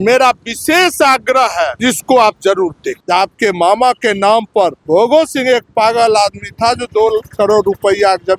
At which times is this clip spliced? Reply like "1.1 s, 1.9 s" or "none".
1.7 s, 2.9 s, 4.8 s